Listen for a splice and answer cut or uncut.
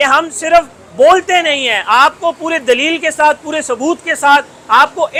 uncut